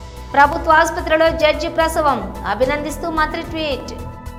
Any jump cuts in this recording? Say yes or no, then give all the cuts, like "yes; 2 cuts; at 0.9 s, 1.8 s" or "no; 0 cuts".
no; 0 cuts